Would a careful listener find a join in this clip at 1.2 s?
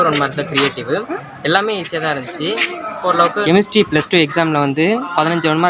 yes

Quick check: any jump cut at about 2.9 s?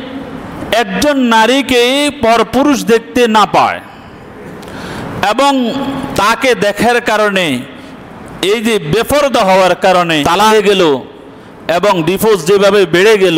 no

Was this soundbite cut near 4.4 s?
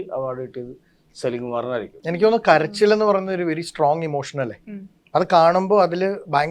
no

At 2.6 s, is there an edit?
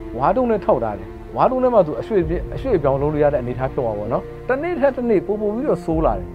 no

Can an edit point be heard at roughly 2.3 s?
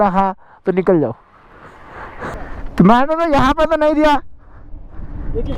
yes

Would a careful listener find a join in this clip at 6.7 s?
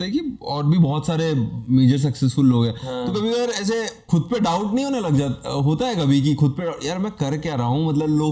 no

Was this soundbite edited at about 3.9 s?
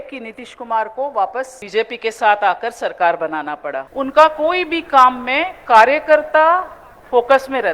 yes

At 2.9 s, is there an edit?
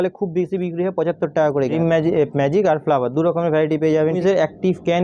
no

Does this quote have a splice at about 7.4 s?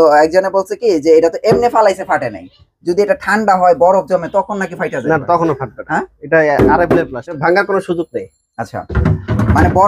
yes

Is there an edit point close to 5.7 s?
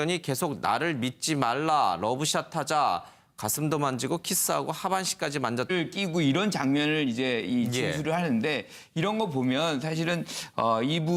no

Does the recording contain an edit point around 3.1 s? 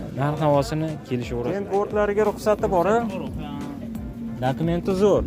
no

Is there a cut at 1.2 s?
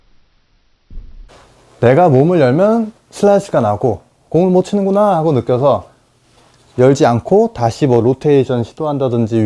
yes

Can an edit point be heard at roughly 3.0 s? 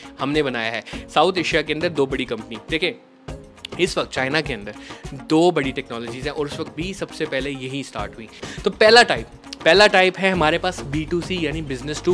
no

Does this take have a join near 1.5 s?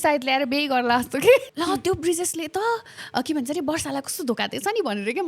yes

